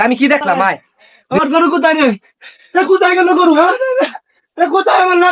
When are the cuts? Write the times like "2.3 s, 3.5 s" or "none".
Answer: 1.2 s

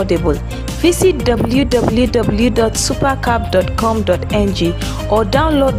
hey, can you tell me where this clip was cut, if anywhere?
none

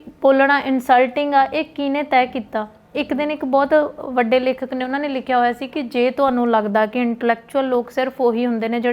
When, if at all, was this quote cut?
none

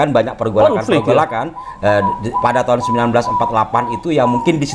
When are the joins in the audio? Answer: none

